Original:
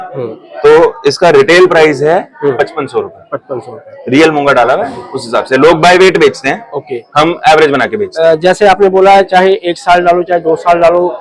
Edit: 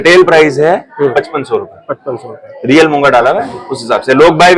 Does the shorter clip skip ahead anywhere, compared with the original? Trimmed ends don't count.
no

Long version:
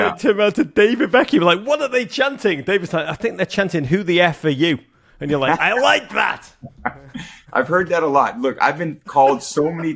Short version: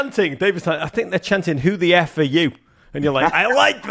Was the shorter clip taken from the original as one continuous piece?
yes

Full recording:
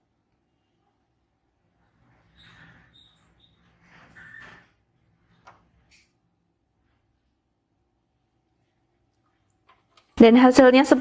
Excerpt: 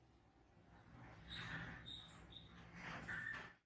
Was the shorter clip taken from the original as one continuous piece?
yes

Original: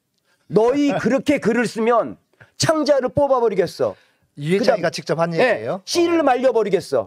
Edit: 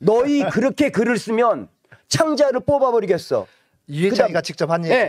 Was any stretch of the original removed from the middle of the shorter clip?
no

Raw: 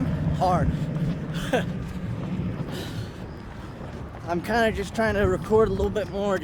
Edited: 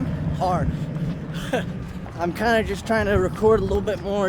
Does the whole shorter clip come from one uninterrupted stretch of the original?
no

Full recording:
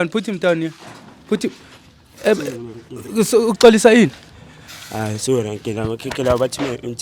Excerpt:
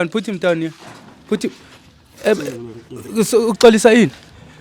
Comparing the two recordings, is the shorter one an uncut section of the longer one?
yes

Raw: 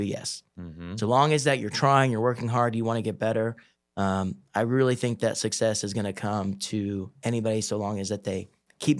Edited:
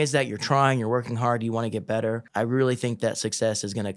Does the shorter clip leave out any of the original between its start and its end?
yes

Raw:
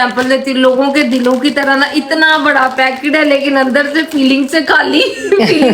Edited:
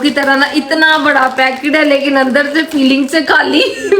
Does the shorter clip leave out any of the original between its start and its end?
no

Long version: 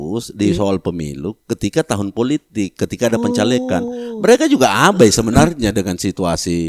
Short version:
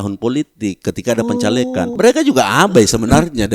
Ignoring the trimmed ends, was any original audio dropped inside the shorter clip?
yes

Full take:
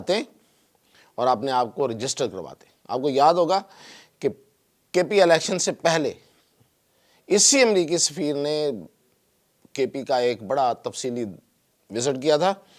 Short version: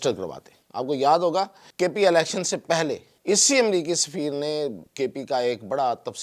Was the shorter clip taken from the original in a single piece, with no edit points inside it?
no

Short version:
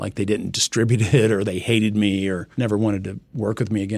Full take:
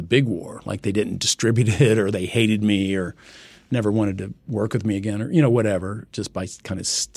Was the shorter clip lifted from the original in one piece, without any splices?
no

